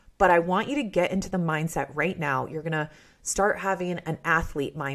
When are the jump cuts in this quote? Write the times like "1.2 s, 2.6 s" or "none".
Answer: none